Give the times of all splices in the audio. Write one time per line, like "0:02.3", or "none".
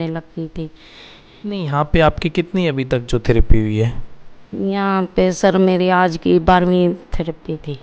0:01.3

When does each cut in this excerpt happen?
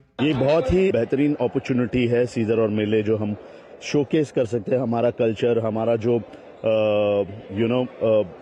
0:00.9

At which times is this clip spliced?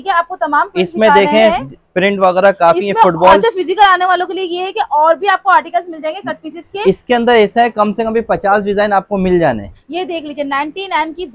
0:09.8

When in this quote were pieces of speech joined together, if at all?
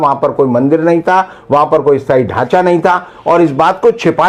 none

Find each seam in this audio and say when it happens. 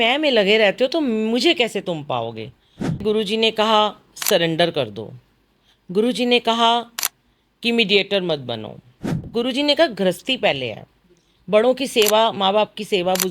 0:03.0
0:09.2

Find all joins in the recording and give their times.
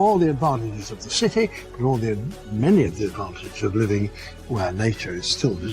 0:01.6

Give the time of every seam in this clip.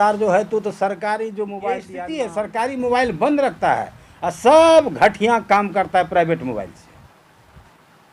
0:01.9

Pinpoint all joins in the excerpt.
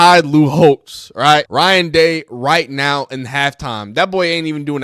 0:01.5

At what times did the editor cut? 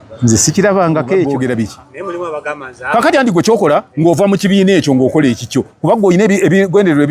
0:01.3

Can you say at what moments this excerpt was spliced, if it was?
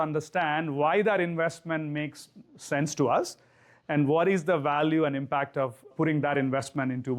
none

